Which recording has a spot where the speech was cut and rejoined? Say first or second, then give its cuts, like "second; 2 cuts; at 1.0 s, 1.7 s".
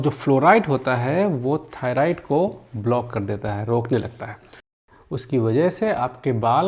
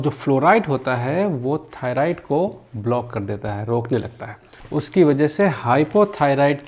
first; 1 cut; at 4.6 s